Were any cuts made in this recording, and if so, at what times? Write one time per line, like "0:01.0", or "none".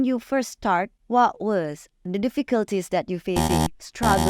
0:01.0
0:02.1

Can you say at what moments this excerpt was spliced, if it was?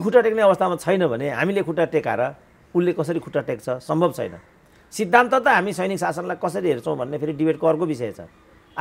none

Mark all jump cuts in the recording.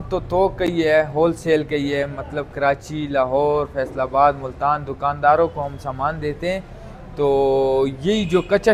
none

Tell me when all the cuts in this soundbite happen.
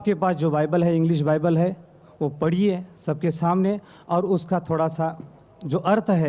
none

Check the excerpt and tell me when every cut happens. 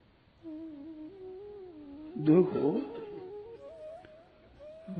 0:01.8

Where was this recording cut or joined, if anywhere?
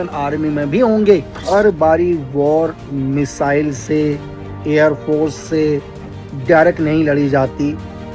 0:01.4

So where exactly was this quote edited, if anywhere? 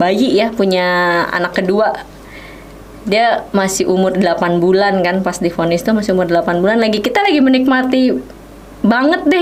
none

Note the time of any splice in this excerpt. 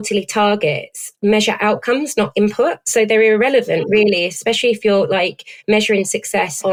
none

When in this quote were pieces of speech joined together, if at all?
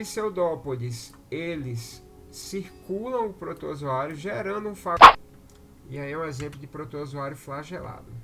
0:05.0

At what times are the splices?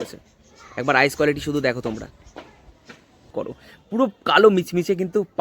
0:03.3

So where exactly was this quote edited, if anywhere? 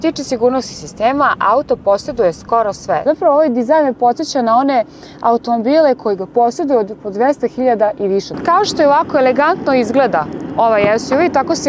0:03.0
0:08.3

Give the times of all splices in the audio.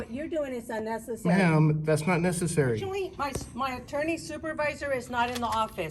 0:02.8

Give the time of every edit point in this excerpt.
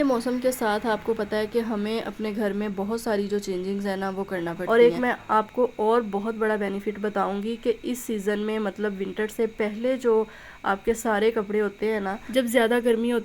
0:04.6
0:12.2

